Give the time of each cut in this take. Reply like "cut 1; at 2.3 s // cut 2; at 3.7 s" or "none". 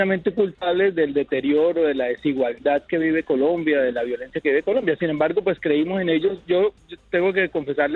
none